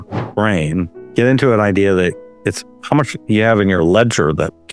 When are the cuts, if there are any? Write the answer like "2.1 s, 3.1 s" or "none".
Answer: 1.0 s